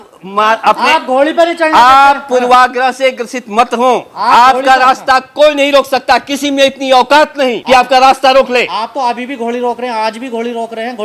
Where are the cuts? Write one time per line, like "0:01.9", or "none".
0:07.6